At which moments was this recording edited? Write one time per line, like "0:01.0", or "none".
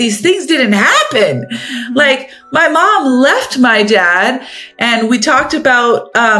none